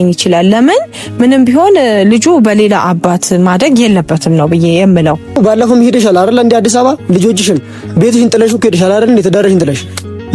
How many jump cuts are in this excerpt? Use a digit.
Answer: 1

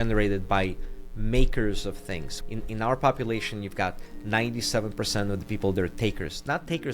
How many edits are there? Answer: 1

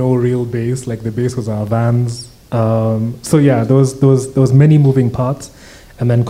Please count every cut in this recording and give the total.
0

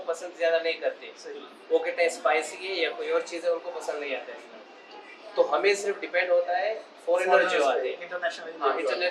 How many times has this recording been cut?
0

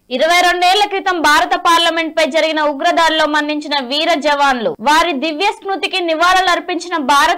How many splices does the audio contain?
0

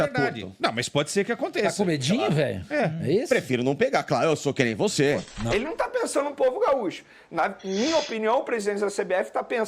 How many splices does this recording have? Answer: 1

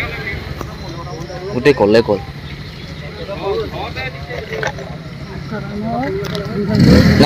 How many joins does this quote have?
0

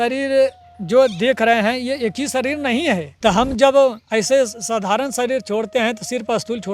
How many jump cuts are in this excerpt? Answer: 1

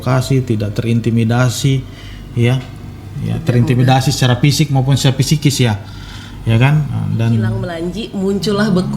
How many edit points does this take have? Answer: 1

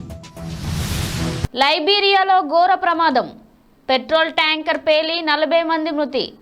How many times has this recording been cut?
1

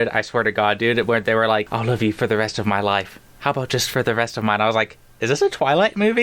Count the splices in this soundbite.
1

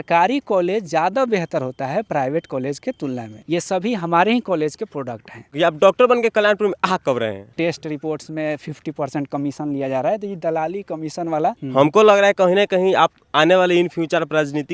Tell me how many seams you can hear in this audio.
4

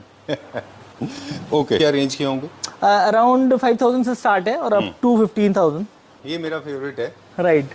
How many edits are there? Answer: 2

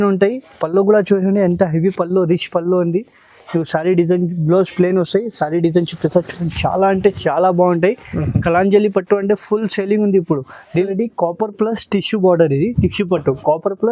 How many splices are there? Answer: 1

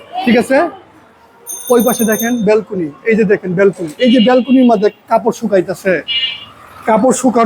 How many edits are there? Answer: 0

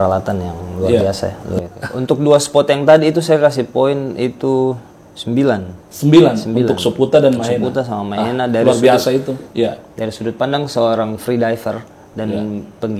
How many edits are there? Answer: 2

